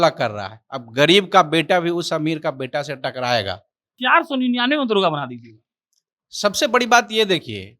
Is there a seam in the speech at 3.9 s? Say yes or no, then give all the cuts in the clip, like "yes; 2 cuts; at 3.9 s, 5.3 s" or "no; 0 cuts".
yes; 1 cut; at 3.9 s